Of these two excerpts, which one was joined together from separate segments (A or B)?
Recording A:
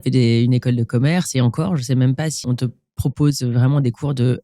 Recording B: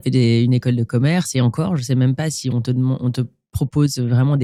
A